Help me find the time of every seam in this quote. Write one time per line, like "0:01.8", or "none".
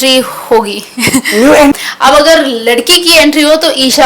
0:01.8

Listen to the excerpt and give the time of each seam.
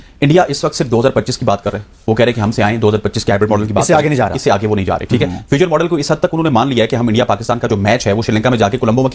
none

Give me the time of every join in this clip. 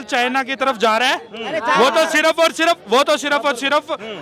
none

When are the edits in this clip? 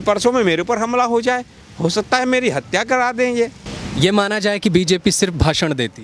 none

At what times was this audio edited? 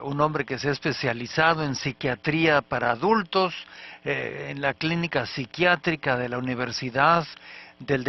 none

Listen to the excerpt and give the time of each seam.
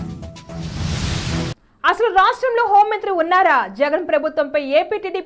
none

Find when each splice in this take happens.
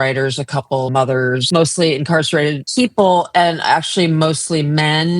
0:01.1
0:02.6

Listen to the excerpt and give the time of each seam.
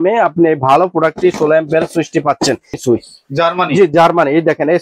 0:02.8

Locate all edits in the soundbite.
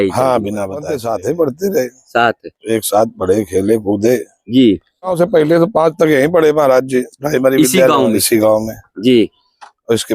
0:01.0
0:05.1

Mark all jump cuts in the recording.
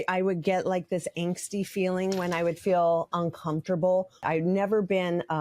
0:04.2

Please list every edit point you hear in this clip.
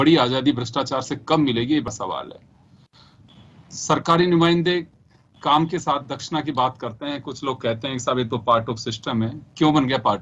0:01.9

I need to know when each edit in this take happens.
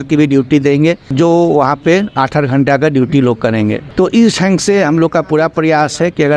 0:01.1
0:03.8

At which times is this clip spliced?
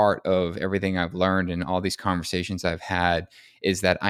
none

